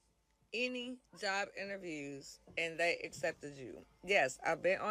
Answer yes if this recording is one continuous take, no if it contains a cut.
yes